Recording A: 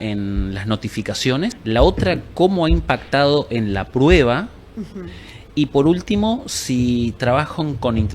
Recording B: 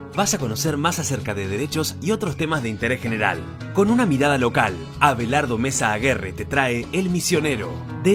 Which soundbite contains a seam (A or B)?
A